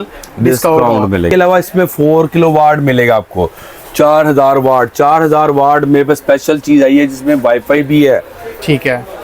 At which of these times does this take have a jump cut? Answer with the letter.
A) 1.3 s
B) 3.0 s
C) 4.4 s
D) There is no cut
A